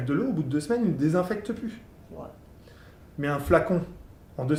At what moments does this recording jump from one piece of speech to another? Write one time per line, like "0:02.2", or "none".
none